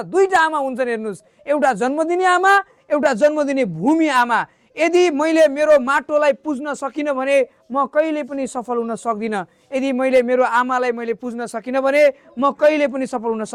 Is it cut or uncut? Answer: uncut